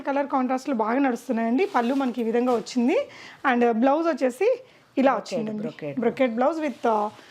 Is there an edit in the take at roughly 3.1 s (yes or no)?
no